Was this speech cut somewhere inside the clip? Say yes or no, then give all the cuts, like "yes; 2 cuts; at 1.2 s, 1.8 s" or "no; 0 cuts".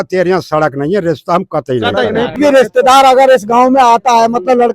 yes; 1 cut; at 2.4 s